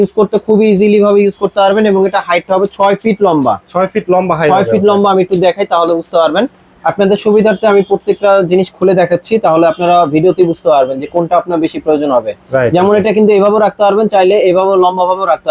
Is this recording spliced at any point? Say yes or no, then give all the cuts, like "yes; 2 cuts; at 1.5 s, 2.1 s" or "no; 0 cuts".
no; 0 cuts